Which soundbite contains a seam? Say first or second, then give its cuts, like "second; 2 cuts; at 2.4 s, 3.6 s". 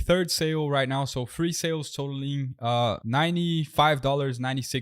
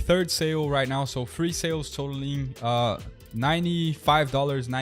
first; 1 cut; at 3.0 s